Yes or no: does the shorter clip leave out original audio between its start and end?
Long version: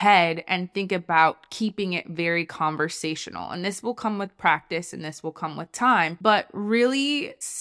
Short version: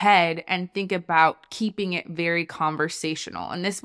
no